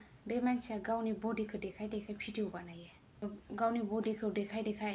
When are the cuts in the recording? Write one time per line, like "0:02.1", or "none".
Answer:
0:03.2